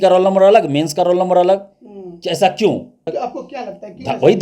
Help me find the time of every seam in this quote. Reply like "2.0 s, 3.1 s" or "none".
3.1 s